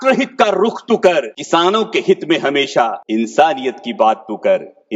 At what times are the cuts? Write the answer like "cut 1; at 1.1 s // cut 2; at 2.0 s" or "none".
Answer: cut 1; at 1.4 s // cut 2; at 3.0 s